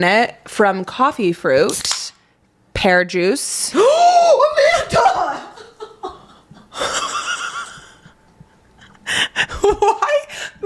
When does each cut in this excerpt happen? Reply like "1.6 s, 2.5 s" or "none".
none